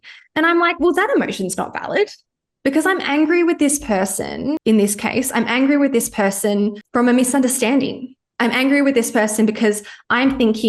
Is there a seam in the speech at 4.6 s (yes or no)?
yes